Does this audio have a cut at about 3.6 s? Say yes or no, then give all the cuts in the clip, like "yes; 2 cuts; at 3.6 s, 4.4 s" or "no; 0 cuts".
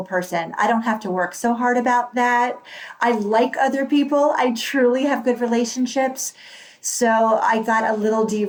no; 0 cuts